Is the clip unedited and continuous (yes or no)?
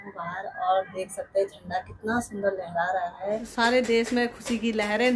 no